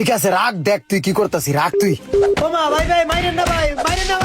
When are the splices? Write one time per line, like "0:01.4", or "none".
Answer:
0:02.4